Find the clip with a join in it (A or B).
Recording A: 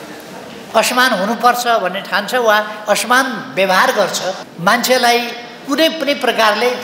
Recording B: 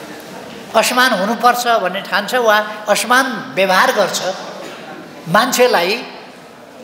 A